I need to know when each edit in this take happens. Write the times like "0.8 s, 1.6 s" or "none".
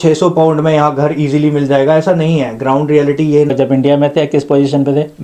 3.5 s